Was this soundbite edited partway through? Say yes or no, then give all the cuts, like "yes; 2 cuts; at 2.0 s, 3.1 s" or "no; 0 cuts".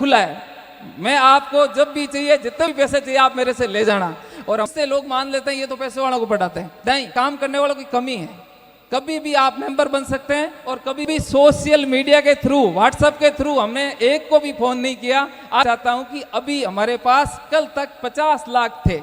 yes; 4 cuts; at 4.7 s, 7.1 s, 11.1 s, 15.6 s